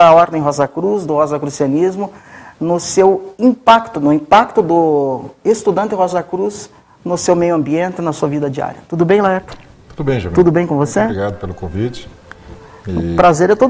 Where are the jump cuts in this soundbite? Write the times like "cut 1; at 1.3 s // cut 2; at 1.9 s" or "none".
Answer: cut 1; at 5.8 s